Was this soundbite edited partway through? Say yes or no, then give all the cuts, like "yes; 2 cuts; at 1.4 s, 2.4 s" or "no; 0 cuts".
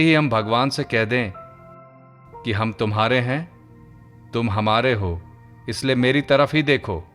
no; 0 cuts